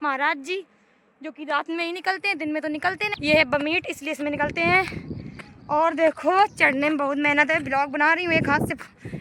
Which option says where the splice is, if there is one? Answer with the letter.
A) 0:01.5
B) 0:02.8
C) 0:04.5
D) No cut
D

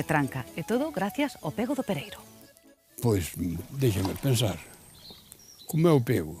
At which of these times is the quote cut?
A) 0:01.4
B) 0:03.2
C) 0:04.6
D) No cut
B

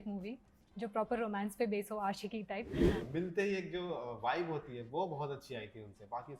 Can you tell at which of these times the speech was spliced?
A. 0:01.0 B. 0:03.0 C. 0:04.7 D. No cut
B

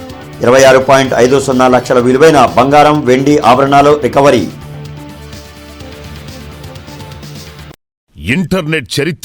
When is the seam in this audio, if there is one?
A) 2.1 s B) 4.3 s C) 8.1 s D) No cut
C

